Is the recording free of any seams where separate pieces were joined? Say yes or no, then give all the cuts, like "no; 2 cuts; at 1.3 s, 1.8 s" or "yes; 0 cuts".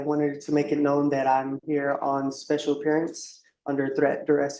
yes; 0 cuts